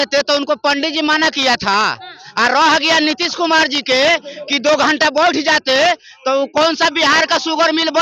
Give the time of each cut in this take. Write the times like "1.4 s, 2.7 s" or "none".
none